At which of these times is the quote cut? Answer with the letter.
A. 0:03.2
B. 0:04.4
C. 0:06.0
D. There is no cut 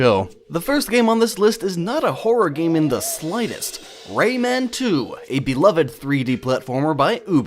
C